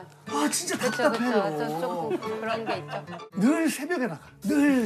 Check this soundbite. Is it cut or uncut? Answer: cut